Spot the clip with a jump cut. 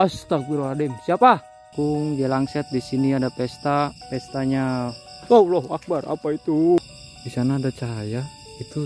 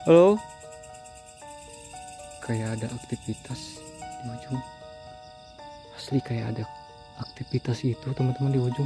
first; 2 cuts; at 1.7 s, 6.8 s

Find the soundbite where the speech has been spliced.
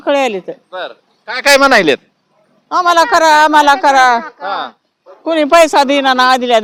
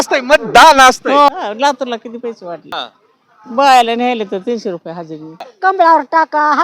second; 3 cuts; at 1.3 s, 2.7 s, 5.4 s

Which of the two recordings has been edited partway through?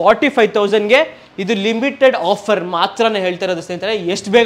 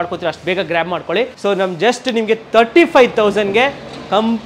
second; 1 cut; at 1.3 s

